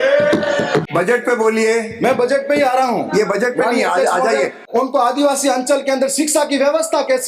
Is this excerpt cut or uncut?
cut